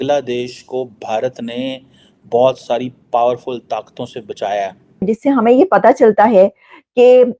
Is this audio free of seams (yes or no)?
no